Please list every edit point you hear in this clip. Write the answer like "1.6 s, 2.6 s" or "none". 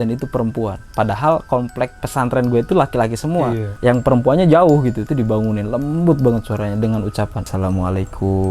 2.0 s, 3.7 s, 5.0 s, 7.4 s